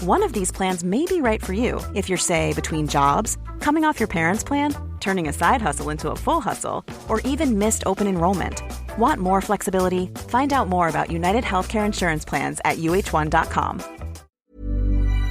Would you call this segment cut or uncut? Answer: cut